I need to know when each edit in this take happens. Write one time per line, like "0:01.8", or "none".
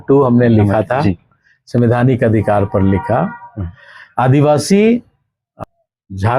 0:05.5